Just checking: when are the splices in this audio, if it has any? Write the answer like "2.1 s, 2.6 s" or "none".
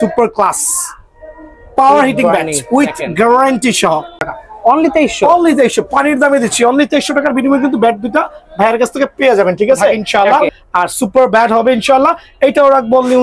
4.4 s, 10.0 s